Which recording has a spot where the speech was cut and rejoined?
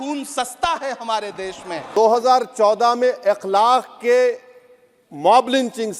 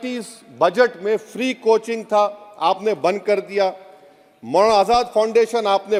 first; 1 cut; at 2.0 s

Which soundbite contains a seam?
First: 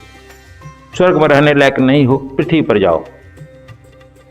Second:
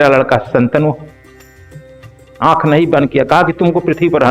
first; 1 cut; at 3.2 s

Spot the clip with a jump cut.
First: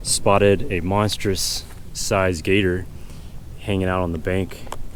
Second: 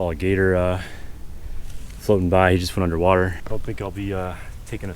second; 1 cut; at 3.4 s

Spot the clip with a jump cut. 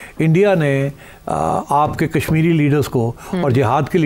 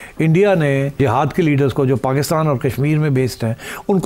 second; 1 cut; at 1.0 s

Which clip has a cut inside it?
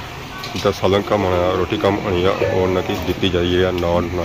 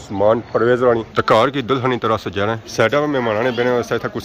second; 2 cuts; at 1.0 s, 2.6 s

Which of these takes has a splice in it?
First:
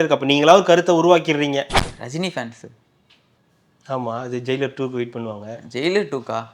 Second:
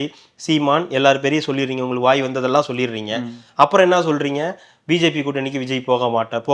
first; 1 cut; at 1.8 s

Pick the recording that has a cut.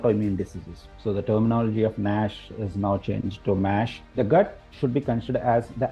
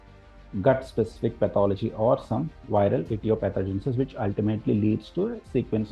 first; 2 cuts; at 0.9 s, 4.0 s

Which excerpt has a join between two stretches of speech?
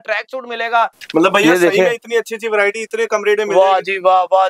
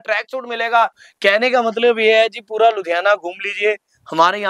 second; 1 cut; at 1.0 s

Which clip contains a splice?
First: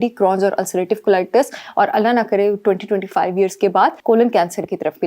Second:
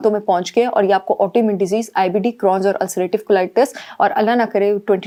first; 1 cut; at 4.0 s

